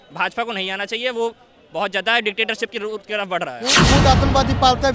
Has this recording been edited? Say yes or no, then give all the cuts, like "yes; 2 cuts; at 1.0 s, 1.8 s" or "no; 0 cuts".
yes; 1 cut; at 3.8 s